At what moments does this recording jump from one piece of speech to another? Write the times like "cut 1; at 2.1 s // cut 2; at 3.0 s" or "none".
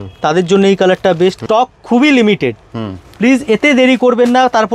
cut 1; at 1.4 s